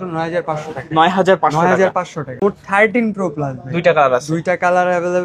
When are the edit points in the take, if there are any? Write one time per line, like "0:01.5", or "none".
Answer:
0:02.4